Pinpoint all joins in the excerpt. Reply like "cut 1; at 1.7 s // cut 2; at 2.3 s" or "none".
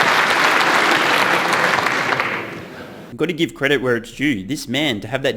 none

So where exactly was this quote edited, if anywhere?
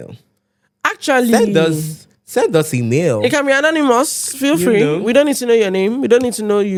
none

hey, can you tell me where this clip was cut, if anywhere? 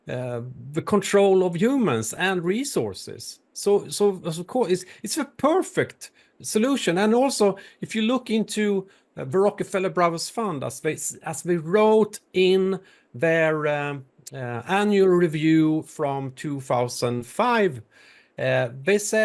none

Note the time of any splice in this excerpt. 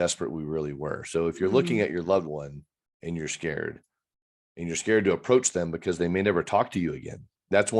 none

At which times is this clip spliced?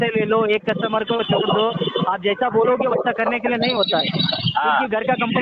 none

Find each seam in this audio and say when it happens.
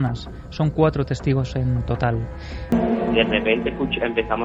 cut 1; at 2.6 s

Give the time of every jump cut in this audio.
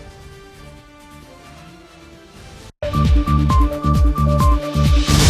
cut 1; at 2.7 s

